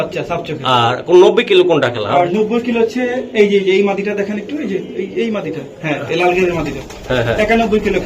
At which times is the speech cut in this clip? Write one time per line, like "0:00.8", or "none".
none

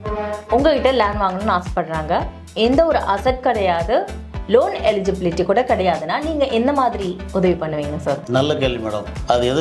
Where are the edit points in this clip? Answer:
0:08.2

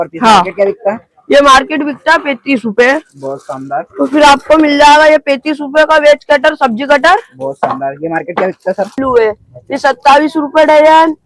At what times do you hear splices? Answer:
0:08.9

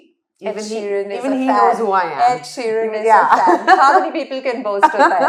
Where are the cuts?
none

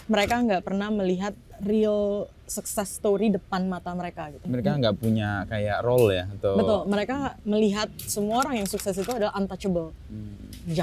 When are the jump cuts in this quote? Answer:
0:01.5
0:04.4

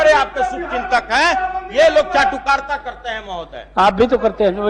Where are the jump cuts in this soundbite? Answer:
none

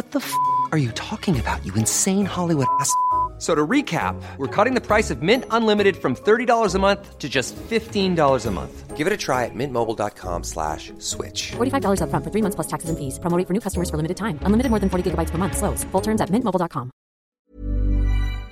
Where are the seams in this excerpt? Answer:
0:17.5

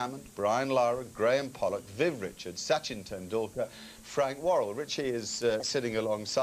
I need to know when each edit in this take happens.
0:04.4

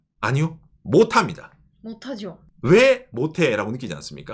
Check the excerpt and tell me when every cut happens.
none

